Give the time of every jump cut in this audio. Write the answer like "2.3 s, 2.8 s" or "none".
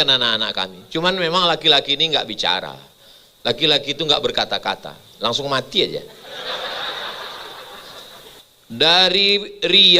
8.3 s